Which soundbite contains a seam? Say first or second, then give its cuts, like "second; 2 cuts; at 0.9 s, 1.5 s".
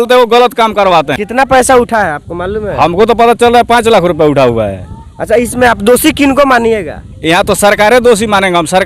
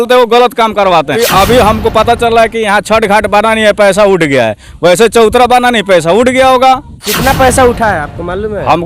second; 2 cuts; at 1.2 s, 7.0 s